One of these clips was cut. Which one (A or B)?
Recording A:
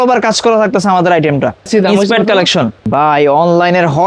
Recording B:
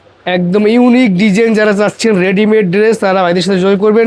A